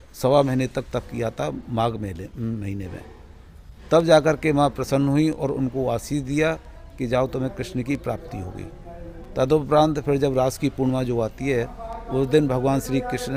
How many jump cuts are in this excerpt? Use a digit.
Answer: 0